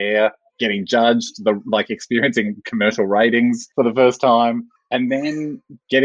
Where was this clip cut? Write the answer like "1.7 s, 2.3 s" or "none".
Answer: 3.6 s, 4.7 s